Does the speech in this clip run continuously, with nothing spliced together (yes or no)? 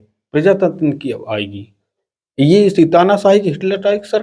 yes